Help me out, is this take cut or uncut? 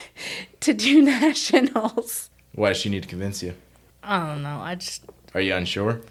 uncut